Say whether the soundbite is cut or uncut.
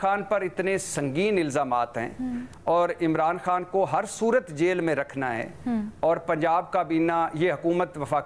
uncut